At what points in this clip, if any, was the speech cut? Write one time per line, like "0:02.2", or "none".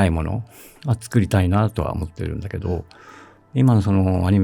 none